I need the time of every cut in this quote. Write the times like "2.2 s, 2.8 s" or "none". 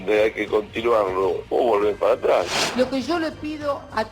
1.5 s, 2.6 s